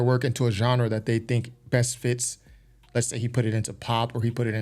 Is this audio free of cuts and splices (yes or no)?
yes